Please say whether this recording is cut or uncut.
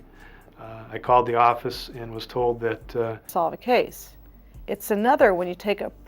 cut